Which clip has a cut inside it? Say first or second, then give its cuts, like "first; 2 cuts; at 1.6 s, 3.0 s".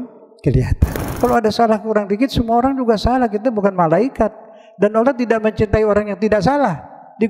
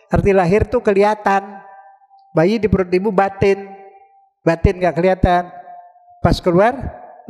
first; 1 cut; at 1.1 s